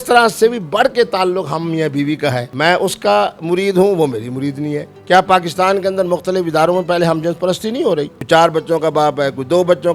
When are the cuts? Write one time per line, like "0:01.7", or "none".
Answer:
0:04.9
0:08.2